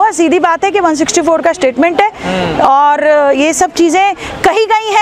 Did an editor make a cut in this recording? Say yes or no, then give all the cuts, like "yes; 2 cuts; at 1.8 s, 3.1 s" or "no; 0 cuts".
no; 0 cuts